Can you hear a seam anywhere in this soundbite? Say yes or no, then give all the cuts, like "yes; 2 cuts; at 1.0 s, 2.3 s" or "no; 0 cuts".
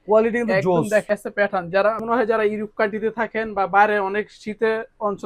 no; 0 cuts